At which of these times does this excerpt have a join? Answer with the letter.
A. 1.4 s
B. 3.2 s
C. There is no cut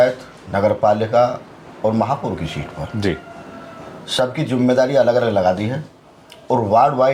C